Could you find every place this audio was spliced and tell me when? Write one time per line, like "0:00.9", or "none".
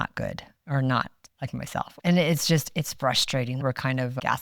0:01.9
0:03.6